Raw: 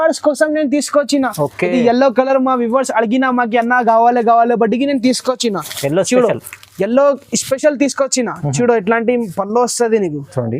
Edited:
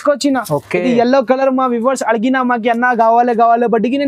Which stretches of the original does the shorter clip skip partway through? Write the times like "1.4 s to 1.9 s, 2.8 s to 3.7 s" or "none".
none